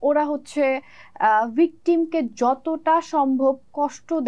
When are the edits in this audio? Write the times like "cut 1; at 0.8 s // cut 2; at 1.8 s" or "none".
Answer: none